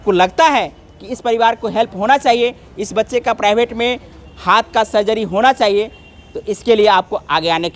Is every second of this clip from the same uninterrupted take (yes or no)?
yes